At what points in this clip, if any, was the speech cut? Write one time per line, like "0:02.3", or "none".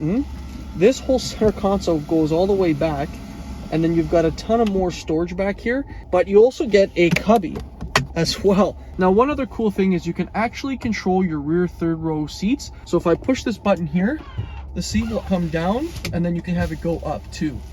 0:06.0
0:08.8
0:12.7
0:15.2
0:16.4